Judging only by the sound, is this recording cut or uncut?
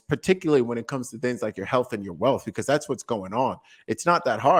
uncut